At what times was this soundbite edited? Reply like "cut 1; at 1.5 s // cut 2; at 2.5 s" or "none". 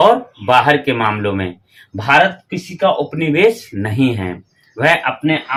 none